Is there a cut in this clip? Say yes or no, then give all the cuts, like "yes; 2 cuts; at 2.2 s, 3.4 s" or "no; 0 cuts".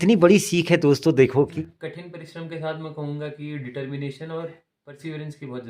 yes; 1 cut; at 1.5 s